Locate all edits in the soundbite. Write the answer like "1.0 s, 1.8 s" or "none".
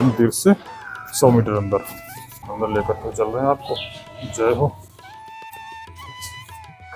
2.5 s

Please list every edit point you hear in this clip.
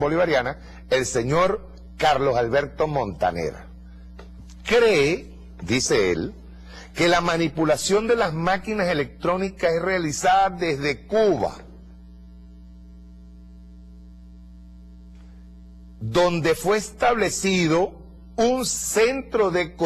5.9 s

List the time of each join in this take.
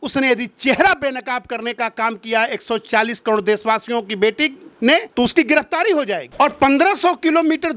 none

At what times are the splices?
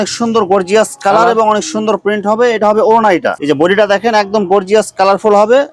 3.3 s

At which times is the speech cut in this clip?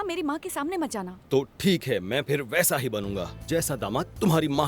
none

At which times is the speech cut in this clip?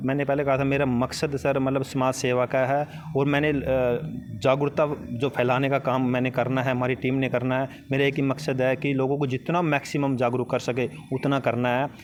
none

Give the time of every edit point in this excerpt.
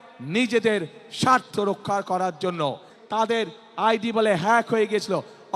2.9 s

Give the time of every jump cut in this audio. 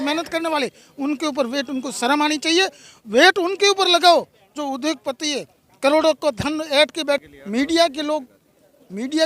7.2 s

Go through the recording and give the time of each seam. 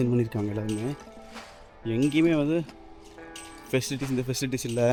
none

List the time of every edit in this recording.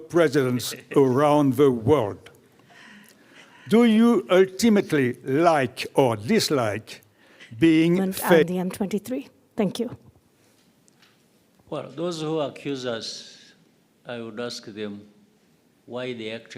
8.4 s

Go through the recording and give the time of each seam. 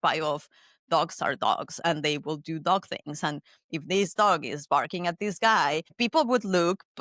6.0 s

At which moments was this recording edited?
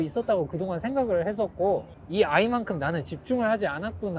2.0 s

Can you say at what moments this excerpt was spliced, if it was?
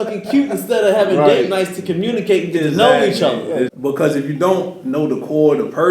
3.7 s

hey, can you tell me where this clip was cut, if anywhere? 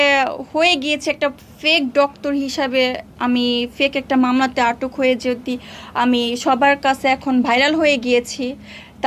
none

